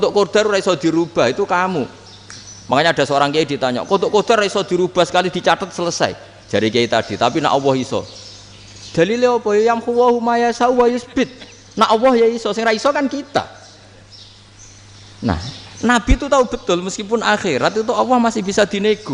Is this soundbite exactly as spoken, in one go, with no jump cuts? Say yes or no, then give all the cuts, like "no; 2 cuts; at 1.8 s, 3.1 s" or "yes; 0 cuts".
yes; 0 cuts